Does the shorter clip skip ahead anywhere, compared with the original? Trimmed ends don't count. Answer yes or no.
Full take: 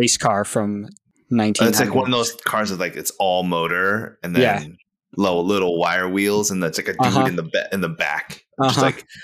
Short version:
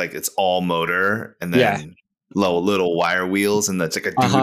no